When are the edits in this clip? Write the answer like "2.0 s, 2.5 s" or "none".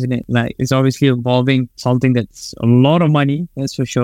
none